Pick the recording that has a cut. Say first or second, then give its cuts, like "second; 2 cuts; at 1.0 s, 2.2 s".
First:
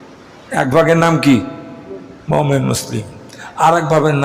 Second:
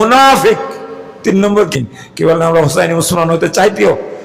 second; 1 cut; at 1.7 s